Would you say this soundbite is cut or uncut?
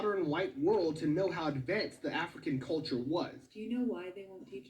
cut